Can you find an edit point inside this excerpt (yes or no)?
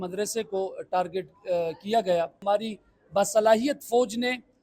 yes